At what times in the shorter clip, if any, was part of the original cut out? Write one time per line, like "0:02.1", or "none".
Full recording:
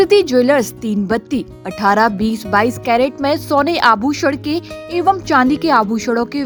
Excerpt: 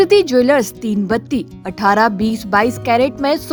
none